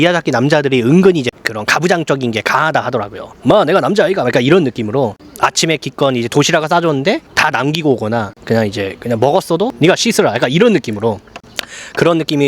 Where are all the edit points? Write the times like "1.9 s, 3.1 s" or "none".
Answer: 1.3 s, 5.2 s, 9.7 s